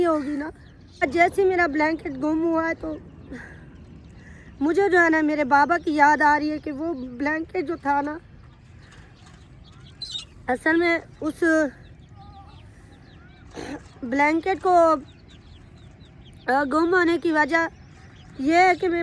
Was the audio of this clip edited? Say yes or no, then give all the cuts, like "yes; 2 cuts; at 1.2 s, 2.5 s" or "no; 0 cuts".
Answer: yes; 1 cut; at 1.0 s